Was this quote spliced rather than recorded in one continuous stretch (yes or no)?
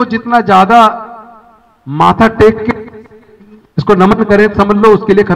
no